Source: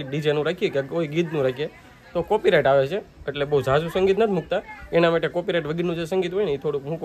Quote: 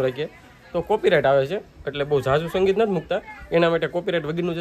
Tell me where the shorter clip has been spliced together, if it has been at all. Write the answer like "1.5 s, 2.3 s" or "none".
none